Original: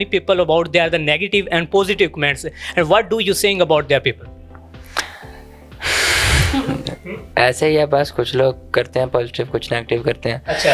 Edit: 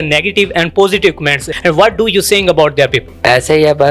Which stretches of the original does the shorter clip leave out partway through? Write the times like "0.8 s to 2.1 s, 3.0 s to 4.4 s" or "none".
2.4 s to 2.6 s, 4.2 s to 7.2 s